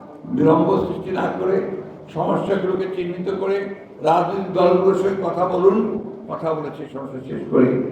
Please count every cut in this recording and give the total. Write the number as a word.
zero